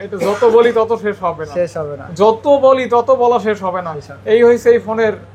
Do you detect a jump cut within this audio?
no; 0 cuts

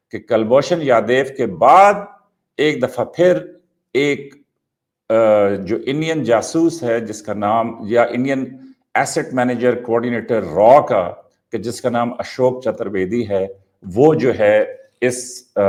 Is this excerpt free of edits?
yes; 0 cuts

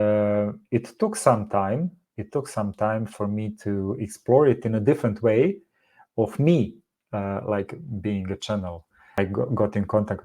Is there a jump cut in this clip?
yes; 1 cut; at 9.2 s

